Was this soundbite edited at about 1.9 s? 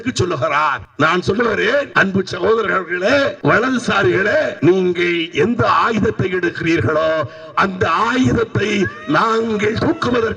yes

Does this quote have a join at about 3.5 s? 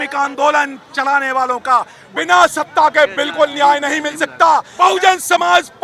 no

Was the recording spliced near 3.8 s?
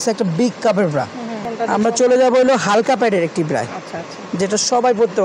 no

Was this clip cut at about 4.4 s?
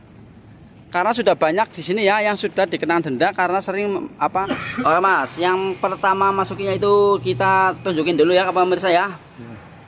yes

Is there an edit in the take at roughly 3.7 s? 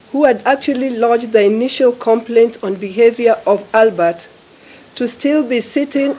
no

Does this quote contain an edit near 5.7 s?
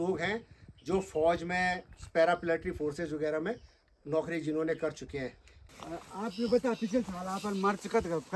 yes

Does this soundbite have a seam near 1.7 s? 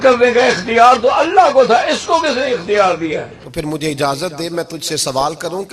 no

